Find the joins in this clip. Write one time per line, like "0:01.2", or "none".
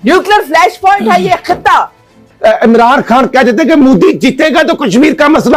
0:02.2